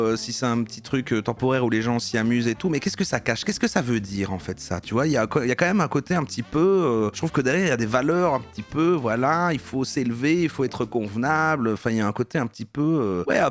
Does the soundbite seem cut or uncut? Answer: uncut